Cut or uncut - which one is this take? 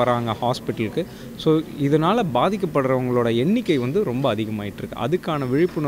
uncut